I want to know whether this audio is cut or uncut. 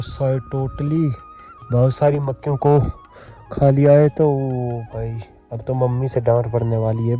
uncut